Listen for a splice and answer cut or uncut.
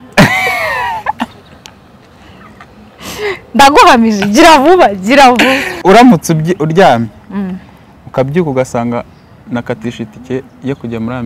cut